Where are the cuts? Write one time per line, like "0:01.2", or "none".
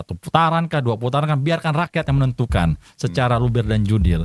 none